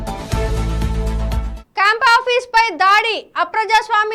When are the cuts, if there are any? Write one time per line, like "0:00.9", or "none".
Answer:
none